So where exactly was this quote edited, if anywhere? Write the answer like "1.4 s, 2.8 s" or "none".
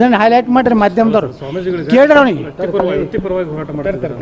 none